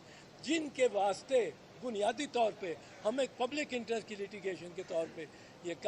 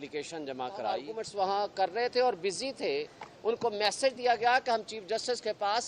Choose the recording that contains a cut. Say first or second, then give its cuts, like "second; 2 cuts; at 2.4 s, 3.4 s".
second; 1 cut; at 1.2 s